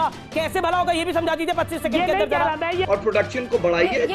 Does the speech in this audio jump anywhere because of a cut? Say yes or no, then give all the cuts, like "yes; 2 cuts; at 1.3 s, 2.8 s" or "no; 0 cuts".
yes; 1 cut; at 2.9 s